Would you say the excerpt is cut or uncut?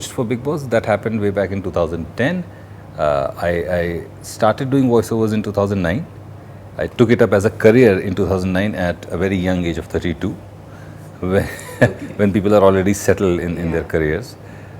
uncut